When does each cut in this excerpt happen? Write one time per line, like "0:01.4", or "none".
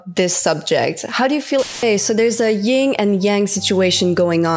0:01.8